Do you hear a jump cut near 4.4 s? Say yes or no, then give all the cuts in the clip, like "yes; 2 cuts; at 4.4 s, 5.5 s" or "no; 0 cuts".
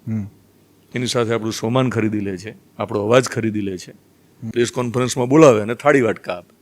yes; 1 cut; at 4.4 s